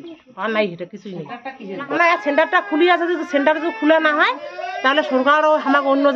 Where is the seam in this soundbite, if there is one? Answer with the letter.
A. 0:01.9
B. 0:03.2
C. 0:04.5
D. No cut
A